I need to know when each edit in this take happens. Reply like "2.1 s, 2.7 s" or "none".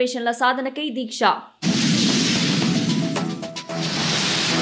none